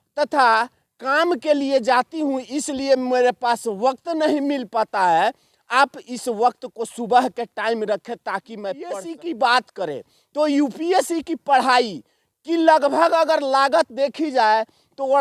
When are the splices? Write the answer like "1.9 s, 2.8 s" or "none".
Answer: 8.9 s